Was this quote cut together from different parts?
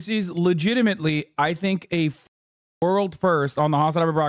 no; 0 cuts

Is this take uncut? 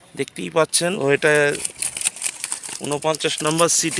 no; 1 cut; at 1.0 s

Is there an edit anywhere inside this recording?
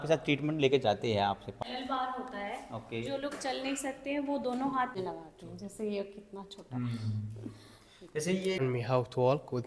yes; 3 cuts; at 1.5 s, 5.0 s, 8.6 s

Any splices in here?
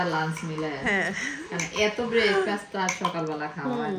no; 0 cuts

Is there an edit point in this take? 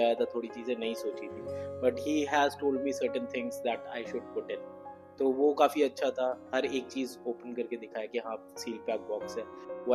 no; 0 cuts

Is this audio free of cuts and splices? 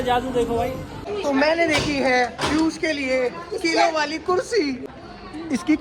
yes; 0 cuts

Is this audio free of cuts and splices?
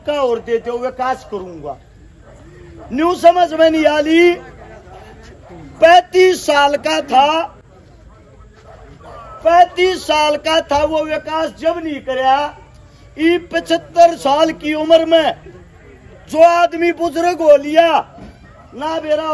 yes; 0 cuts

